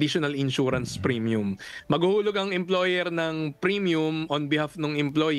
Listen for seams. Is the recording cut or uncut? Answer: uncut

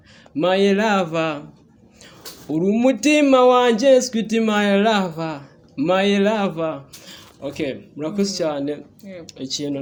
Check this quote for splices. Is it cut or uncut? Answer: uncut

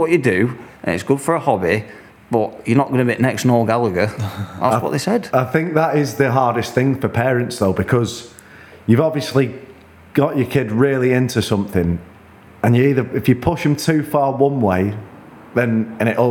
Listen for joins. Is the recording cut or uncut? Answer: uncut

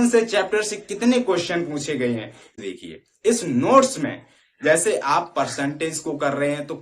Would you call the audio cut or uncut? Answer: cut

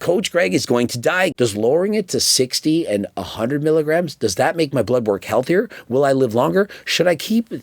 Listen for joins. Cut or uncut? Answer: cut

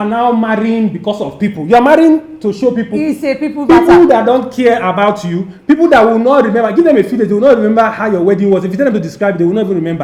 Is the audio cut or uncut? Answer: uncut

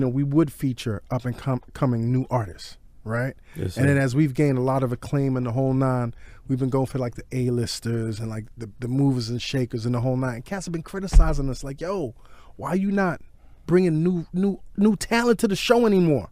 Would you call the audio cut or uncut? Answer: cut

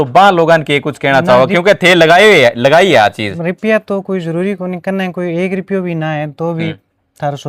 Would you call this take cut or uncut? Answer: uncut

